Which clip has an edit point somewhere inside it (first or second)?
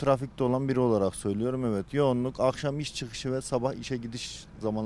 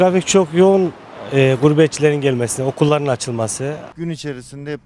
second